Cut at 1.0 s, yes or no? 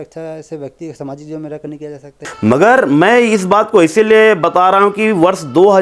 no